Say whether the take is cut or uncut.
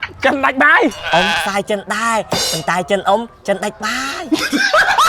cut